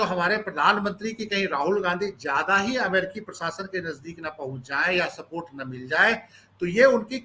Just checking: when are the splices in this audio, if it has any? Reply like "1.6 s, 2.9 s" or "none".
none